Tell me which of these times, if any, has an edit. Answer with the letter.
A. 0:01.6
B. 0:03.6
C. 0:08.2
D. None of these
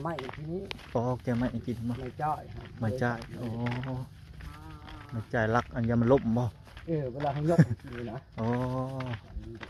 D